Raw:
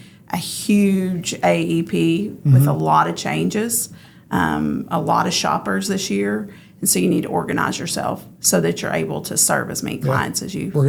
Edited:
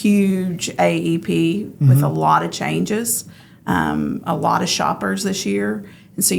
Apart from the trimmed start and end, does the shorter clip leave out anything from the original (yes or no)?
no